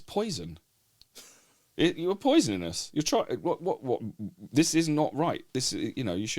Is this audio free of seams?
yes; 0 cuts

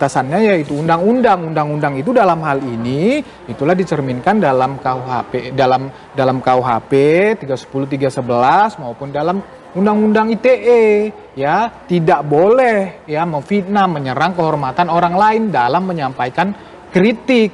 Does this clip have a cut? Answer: no; 0 cuts

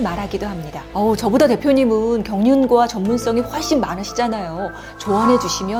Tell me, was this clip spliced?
no; 0 cuts

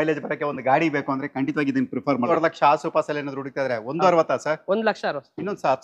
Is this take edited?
yes; 1 cut; at 2.3 s

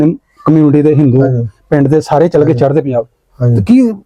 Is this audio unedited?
yes; 0 cuts

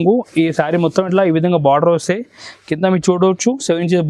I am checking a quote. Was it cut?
no; 0 cuts

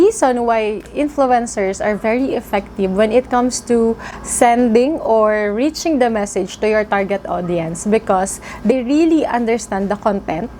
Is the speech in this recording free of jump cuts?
yes; 0 cuts

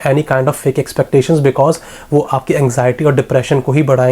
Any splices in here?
no; 0 cuts

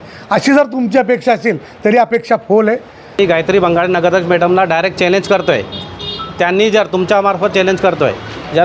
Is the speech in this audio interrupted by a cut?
yes; 1 cut; at 3.2 s

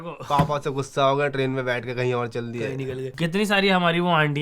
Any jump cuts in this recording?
yes; 1 cut; at 3.1 s

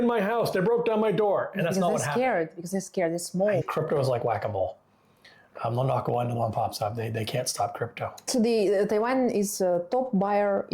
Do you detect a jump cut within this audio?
yes; 2 cuts; at 3.6 s, 8.2 s

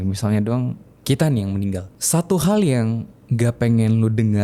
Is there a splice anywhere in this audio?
yes; 1 cut; at 1.9 s

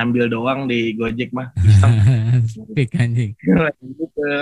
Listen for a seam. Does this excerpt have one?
no; 0 cuts

